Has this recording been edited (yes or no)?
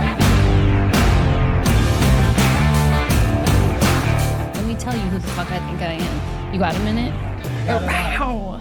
no